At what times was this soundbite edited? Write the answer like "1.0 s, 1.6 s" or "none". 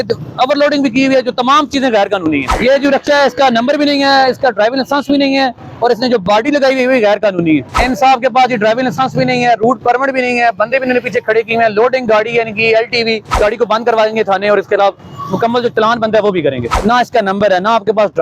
2.5 s, 7.7 s, 13.3 s, 16.7 s